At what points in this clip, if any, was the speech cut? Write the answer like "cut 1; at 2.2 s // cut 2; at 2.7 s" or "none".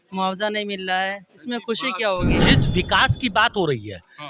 cut 1; at 2.3 s